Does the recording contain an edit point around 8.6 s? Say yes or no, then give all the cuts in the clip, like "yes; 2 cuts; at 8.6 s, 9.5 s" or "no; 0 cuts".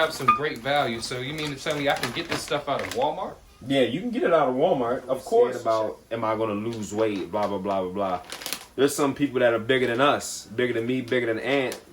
no; 1 cut; at 5.6 s